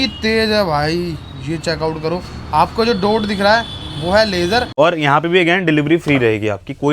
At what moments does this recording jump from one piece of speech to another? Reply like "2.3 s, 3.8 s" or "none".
4.7 s